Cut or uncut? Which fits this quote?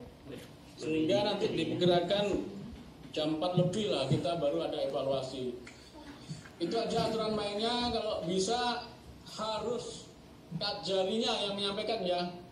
uncut